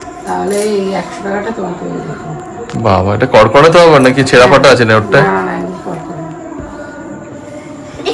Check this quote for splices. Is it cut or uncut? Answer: uncut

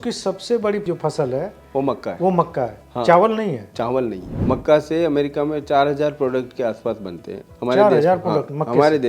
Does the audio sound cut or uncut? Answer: cut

